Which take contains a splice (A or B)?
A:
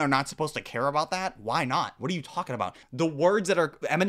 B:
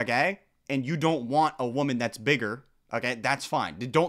A